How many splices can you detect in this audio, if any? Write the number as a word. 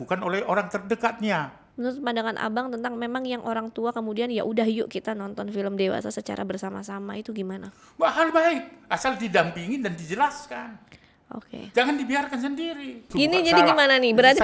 two